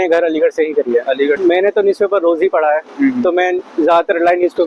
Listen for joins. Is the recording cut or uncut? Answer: cut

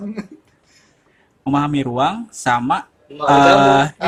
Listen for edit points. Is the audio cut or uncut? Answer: uncut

